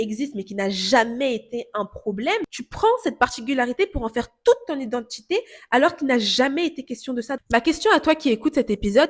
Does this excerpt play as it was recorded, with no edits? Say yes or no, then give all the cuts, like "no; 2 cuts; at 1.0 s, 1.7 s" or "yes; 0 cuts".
no; 2 cuts; at 2.6 s, 7.4 s